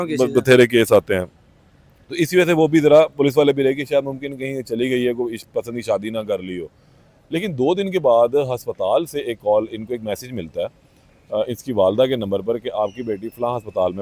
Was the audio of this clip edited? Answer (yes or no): no